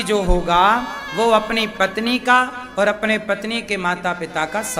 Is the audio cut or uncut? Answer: uncut